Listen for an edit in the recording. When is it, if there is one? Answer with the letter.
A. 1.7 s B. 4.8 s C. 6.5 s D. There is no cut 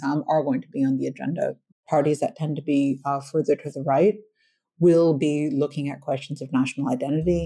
A